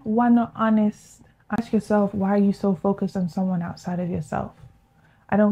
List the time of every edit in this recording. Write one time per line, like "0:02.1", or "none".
0:01.6

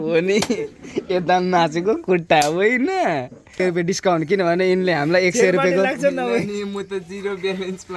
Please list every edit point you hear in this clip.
0:03.6

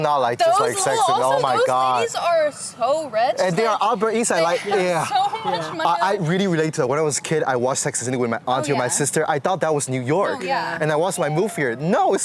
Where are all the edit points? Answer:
none

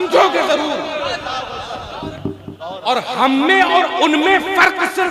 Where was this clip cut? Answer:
0:02.1

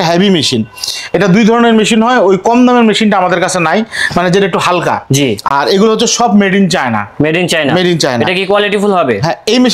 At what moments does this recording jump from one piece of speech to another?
none

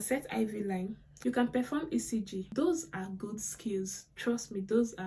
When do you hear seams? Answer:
0:01.0

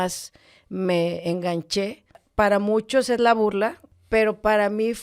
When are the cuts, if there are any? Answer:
0:02.2
0:03.9

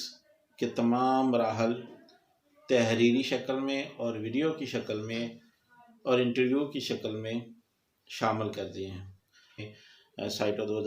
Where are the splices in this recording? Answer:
0:09.7

